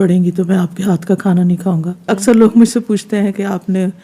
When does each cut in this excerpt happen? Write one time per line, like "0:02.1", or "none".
0:02.0

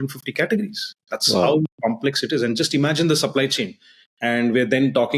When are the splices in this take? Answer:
none

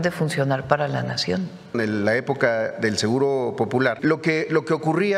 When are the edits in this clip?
0:01.7
0:04.0

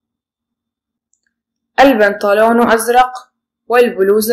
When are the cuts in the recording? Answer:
0:00.9

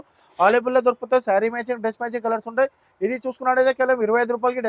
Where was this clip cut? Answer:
none

